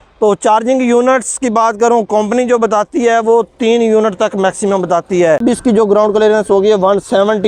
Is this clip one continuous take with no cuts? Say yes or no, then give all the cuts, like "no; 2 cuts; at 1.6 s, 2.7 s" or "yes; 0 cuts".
no; 1 cut; at 5.4 s